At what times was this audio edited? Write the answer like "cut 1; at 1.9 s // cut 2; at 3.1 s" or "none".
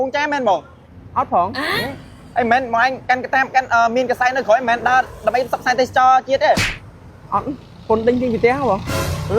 cut 1; at 1.7 s